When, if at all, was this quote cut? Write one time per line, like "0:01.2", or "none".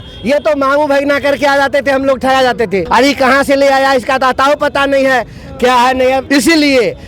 0:02.9
0:06.2